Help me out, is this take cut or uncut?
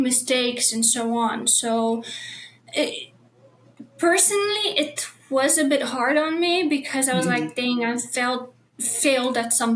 uncut